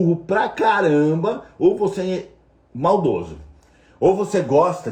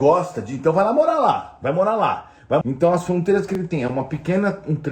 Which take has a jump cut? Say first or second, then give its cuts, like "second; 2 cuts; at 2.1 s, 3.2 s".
second; 1 cut; at 2.6 s